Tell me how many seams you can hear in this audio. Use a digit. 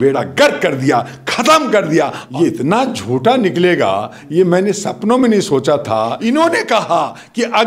2